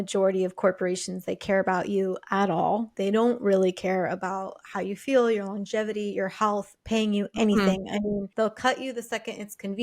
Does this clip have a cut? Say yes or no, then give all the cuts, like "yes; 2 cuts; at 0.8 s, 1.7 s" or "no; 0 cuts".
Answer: yes; 2 cuts; at 2.9 s, 8.3 s